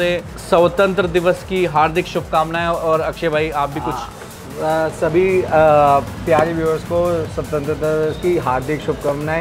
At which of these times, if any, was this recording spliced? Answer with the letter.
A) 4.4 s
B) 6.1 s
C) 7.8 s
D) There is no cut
D